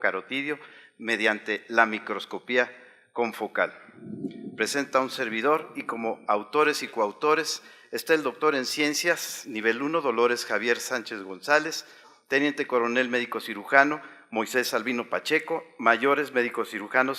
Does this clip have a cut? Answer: yes; 1 cut; at 10.7 s

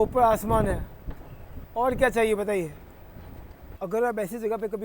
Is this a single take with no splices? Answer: no; 1 cut; at 3.7 s

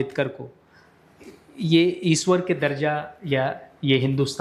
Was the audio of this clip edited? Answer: no; 0 cuts

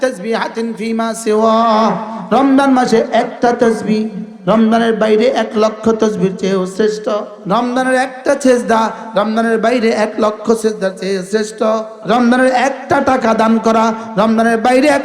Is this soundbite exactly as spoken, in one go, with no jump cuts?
no; 2 cuts; at 7.3 s, 11.9 s

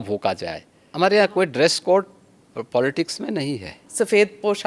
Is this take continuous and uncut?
no; 2 cuts; at 0.9 s, 3.8 s

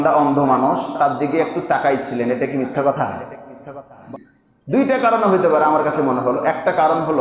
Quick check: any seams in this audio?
yes; 1 cut; at 4.0 s

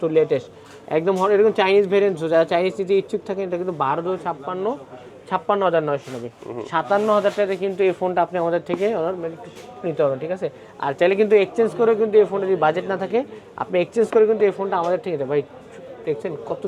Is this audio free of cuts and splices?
yes; 0 cuts

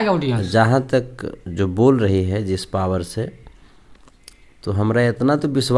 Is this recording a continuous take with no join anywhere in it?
yes; 0 cuts

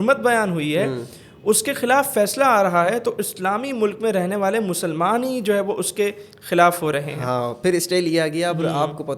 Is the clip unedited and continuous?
yes; 0 cuts

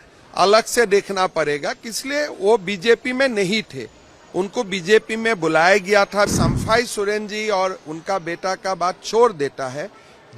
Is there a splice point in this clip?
yes; 1 cut; at 6.3 s

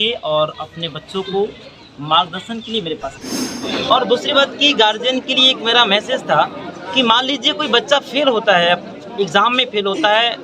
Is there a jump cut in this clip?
yes; 1 cut; at 3.7 s

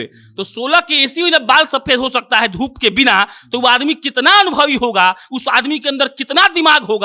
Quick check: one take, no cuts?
yes; 0 cuts

